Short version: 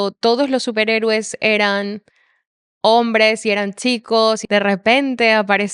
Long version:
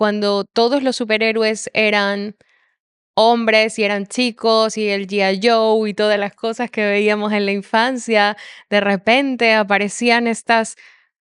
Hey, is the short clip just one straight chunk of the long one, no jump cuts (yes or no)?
no